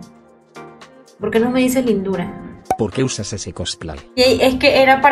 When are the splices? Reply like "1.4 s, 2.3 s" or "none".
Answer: 2.6 s